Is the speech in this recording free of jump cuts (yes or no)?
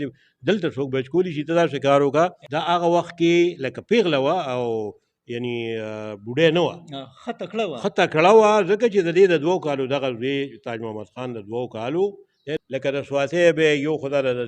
no